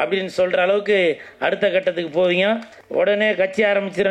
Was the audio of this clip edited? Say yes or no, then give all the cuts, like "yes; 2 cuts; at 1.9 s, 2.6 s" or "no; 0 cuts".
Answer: yes; 1 cut; at 2.8 s